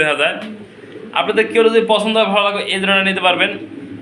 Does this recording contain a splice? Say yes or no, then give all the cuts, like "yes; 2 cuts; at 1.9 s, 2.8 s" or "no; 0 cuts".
no; 0 cuts